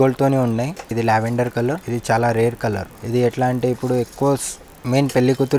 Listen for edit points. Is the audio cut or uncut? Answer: cut